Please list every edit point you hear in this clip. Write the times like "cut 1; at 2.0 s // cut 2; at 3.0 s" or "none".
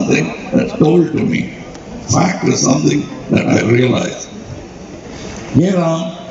cut 1; at 5.1 s